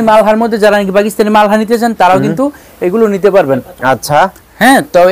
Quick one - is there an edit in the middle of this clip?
no; 0 cuts

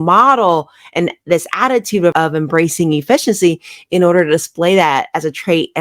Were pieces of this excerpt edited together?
no; 0 cuts

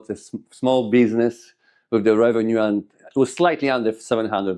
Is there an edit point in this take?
no; 0 cuts

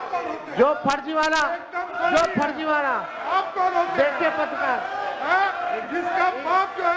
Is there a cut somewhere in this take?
no; 0 cuts

